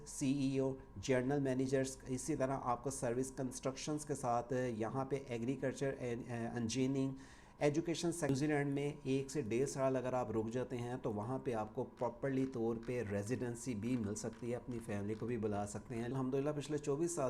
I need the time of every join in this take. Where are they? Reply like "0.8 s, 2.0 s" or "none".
8.3 s, 16.1 s